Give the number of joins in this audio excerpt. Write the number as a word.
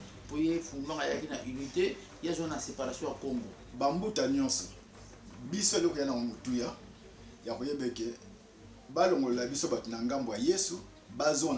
one